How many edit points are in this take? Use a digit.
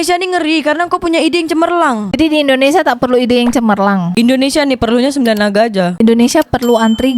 1